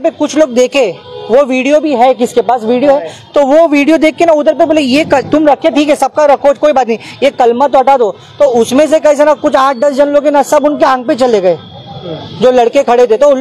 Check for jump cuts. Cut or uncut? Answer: uncut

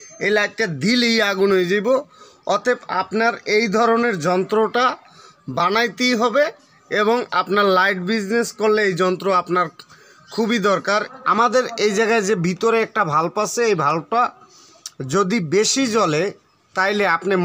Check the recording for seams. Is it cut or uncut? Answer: cut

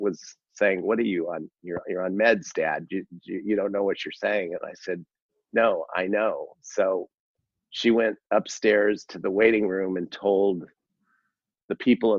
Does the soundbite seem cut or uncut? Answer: uncut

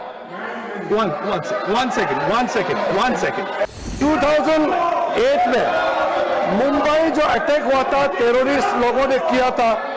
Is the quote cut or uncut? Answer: cut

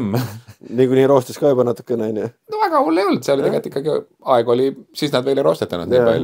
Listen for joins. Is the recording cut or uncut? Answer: uncut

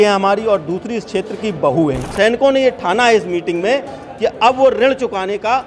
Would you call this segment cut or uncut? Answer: cut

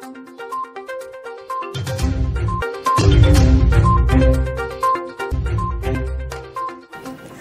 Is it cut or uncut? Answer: uncut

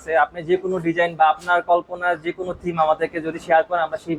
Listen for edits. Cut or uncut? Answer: uncut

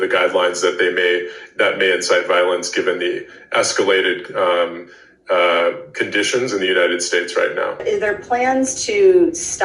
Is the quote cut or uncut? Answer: cut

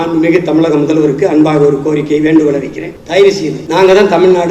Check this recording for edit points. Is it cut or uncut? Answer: cut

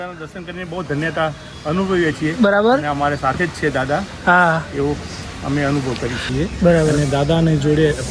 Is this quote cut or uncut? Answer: cut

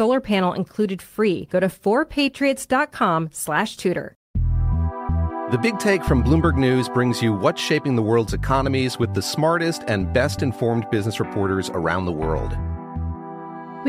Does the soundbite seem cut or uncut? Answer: cut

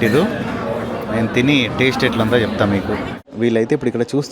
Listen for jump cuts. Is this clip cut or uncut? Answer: cut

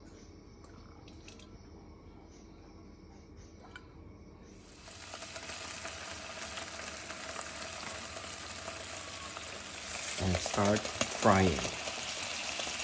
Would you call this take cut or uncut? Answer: cut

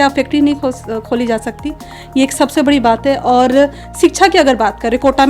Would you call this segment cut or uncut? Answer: uncut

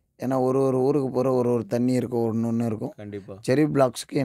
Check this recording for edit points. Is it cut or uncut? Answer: uncut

